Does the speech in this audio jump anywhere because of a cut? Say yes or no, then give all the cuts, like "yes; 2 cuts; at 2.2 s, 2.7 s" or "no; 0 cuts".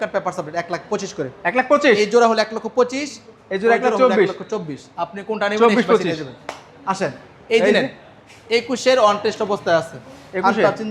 no; 0 cuts